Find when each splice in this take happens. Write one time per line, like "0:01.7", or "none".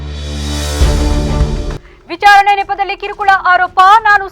0:01.8